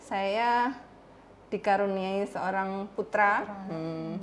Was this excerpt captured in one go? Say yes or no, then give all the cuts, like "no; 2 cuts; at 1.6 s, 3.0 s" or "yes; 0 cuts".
yes; 0 cuts